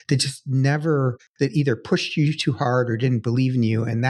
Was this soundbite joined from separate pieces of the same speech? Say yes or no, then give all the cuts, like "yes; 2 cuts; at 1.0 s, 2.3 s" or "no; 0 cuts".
yes; 1 cut; at 1.2 s